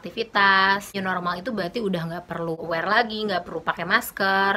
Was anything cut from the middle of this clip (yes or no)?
yes